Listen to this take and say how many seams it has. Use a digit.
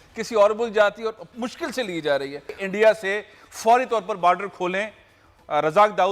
1